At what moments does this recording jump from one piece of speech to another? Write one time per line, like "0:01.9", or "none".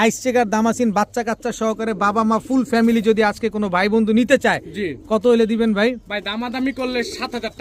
none